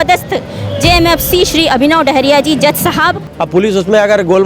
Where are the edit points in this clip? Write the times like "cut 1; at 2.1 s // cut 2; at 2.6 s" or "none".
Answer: cut 1; at 3.3 s